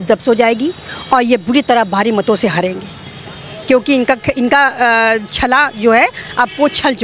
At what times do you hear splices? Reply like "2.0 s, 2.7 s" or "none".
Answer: none

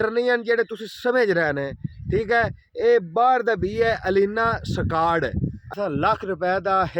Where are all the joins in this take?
5.6 s

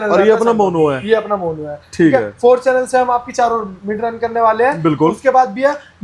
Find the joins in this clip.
none

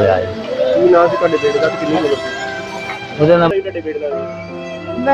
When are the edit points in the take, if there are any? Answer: 3.5 s

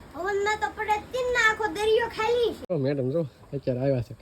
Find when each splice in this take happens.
2.7 s

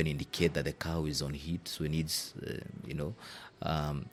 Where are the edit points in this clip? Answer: none

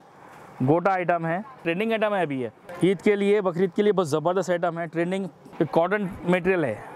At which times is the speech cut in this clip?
1.6 s, 2.6 s, 5.4 s

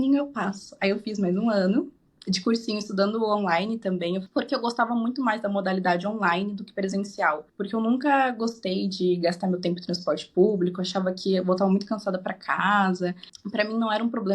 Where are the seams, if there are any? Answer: 4.3 s, 7.5 s, 13.3 s

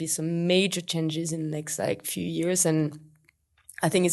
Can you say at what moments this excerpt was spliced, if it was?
none

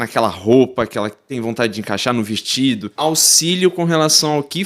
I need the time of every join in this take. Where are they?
2.9 s

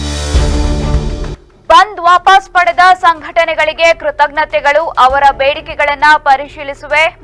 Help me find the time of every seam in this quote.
1.3 s

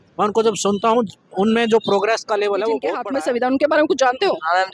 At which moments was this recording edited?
3.0 s

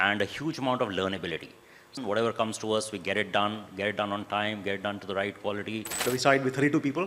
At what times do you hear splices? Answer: 1.9 s, 6.0 s

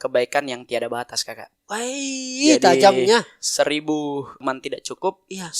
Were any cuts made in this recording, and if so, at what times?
4.4 s

